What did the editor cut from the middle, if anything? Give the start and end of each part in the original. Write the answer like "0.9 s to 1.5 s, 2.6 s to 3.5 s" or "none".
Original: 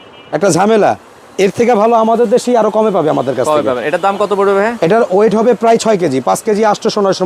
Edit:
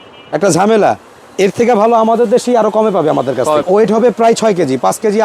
3.7 s to 5.1 s